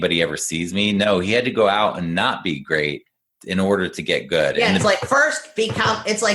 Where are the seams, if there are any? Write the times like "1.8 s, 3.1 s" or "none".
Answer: 4.7 s